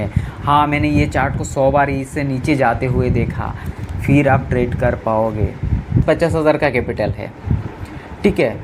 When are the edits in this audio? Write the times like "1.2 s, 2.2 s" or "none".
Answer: 6.0 s